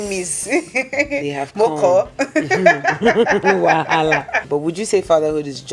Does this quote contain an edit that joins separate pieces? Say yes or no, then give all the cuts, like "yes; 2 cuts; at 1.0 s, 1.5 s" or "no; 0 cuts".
yes; 1 cut; at 4.4 s